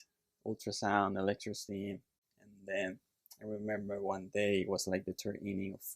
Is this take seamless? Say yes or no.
yes